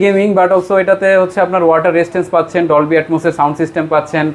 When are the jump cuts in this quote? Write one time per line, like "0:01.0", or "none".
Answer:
none